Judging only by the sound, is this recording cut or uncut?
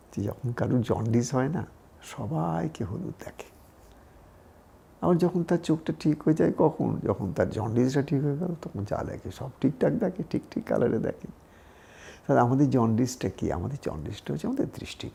uncut